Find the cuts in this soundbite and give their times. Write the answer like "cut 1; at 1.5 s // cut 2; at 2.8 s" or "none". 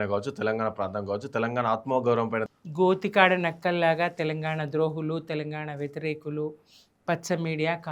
cut 1; at 2.5 s

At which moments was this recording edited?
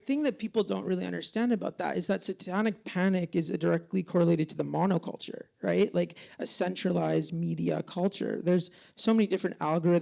none

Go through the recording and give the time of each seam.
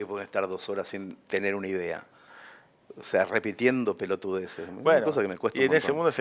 none

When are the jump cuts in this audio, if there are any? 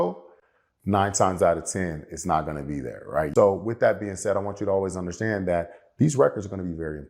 cut 1; at 3.3 s

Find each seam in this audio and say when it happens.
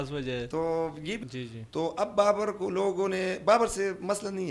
cut 1; at 1.2 s

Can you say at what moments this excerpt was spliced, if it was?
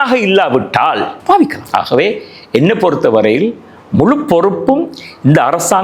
none

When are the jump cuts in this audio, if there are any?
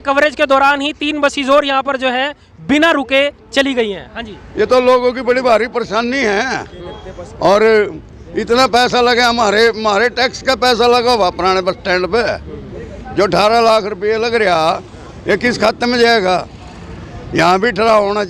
none

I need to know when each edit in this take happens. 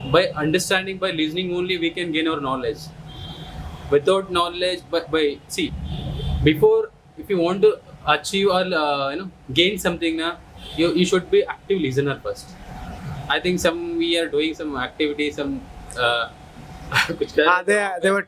none

